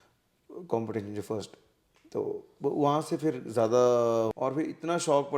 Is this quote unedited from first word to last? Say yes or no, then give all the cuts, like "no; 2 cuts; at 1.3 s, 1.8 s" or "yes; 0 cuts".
no; 1 cut; at 4.3 s